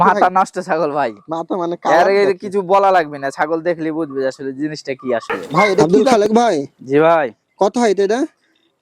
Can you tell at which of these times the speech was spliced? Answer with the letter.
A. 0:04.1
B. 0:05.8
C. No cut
B